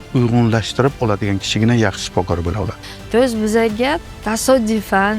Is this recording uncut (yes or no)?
no